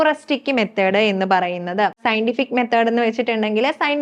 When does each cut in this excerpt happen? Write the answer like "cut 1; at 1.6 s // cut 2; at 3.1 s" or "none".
cut 1; at 2.0 s